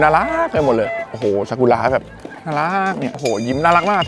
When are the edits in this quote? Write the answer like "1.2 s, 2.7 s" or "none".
none

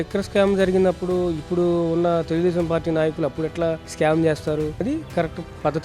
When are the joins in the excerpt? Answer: none

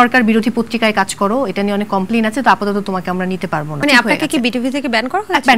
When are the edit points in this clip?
3.8 s

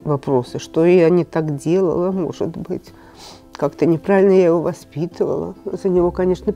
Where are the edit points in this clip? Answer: 5.5 s

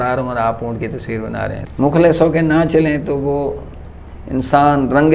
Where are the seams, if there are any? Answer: 1.6 s

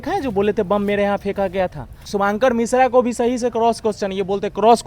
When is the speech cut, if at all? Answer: 2.0 s

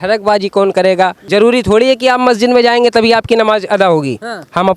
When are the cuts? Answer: 1.2 s

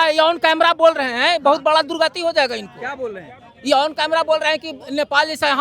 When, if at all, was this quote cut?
none

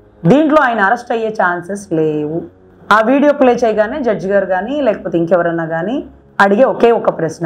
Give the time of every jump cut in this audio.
none

